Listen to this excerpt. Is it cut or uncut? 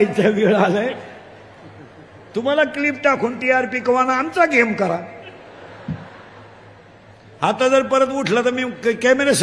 uncut